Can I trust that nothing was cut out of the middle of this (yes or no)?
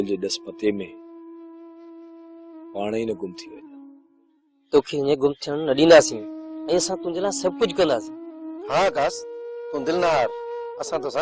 yes